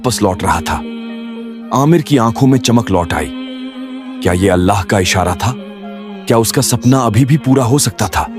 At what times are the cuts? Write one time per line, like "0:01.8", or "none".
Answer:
none